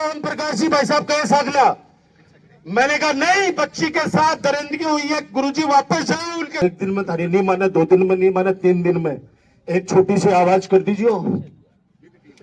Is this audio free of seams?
no; 1 cut; at 6.6 s

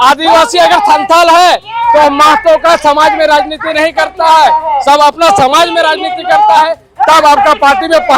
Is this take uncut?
yes; 0 cuts

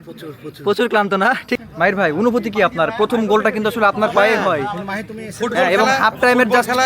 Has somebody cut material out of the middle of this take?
yes; 1 cut; at 1.6 s

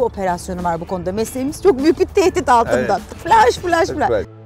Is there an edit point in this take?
no; 0 cuts

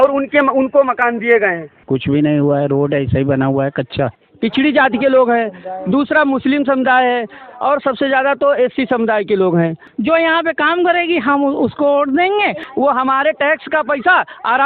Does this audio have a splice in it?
yes; 4 cuts; at 1.7 s, 4.2 s, 9.8 s, 12.6 s

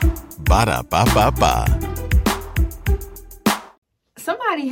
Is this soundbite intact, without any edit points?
no; 1 cut; at 3.7 s

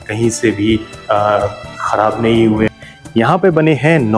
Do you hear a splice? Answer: yes; 1 cut; at 2.7 s

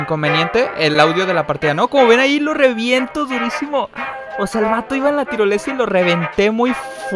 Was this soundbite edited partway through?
no; 0 cuts

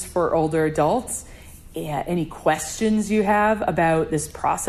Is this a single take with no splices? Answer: yes; 0 cuts

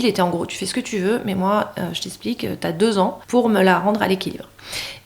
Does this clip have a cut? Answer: yes; 1 cut; at 3.2 s

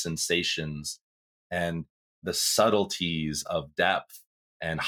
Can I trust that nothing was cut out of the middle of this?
no; 1 cut; at 2.2 s

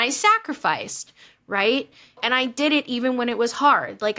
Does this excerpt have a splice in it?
yes; 1 cut; at 2.2 s

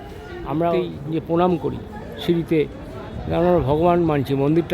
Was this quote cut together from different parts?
yes; 1 cut; at 0.9 s

